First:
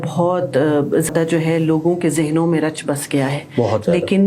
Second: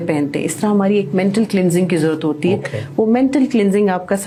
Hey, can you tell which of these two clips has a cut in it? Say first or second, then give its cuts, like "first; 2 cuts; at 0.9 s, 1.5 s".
first; 1 cut; at 1.1 s